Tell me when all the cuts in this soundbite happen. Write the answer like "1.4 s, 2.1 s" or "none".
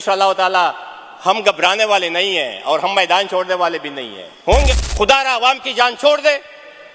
4.8 s